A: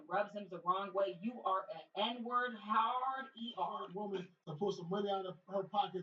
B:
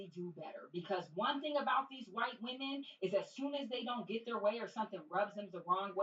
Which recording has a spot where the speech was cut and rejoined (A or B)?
A